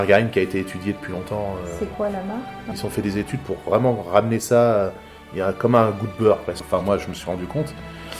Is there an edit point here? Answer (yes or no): yes